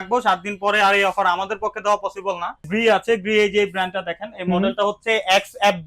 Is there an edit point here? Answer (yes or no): yes